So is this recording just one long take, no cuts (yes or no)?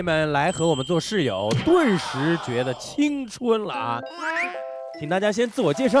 yes